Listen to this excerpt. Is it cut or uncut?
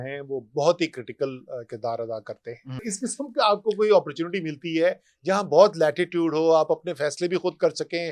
cut